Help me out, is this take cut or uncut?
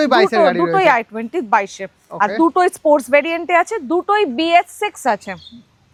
uncut